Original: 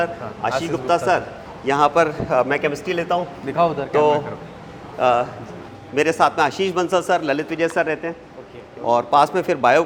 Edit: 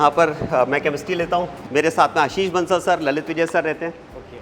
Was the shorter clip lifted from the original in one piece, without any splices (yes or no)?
no